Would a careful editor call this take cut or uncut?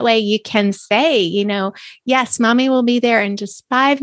uncut